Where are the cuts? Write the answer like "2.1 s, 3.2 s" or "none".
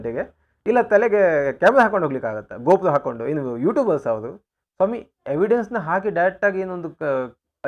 4.3 s